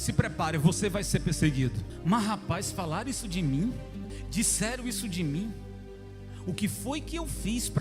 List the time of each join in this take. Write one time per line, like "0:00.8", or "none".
0:01.9
0:04.2